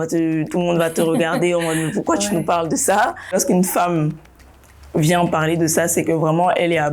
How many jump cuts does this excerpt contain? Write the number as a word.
one